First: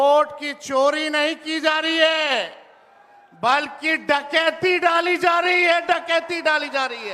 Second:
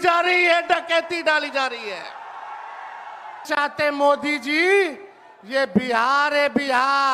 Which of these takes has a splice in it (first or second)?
second